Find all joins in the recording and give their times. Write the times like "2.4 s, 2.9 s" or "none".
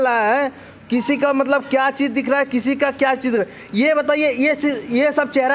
none